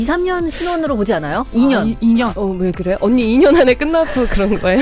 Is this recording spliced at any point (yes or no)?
yes